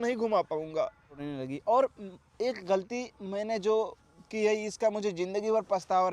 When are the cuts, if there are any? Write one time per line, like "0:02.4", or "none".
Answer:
0:01.2